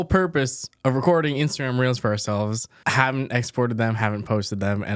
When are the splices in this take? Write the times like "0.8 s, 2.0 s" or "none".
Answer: 2.7 s